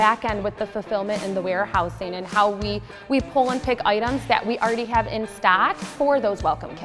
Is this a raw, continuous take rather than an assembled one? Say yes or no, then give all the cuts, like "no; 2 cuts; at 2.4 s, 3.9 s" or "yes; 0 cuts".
yes; 0 cuts